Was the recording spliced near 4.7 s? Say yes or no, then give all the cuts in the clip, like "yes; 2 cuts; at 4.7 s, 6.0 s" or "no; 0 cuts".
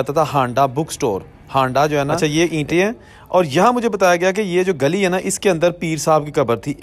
no; 1 cut; at 2.2 s